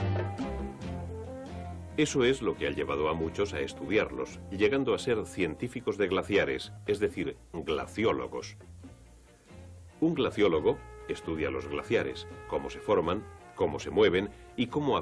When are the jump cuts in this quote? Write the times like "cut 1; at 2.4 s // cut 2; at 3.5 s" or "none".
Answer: none